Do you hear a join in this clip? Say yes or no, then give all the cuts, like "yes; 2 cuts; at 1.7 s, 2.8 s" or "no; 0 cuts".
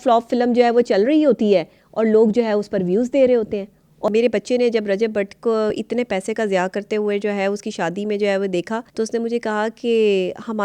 yes; 3 cuts; at 3.9 s, 5.7 s, 8.9 s